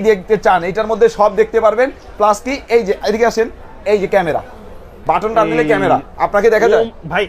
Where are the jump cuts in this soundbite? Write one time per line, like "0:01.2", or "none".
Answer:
none